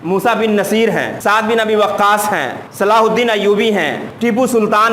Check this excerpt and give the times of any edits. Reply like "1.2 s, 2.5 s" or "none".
1.1 s, 2.6 s, 4.0 s